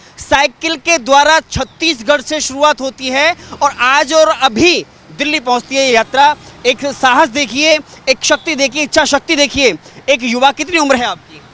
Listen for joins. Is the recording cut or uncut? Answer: uncut